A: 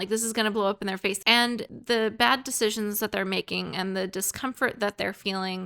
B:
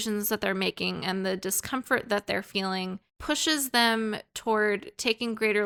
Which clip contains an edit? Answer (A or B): A